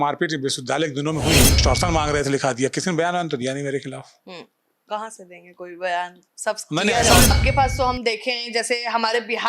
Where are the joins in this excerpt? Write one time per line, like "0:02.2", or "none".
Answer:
0:01.6
0:07.3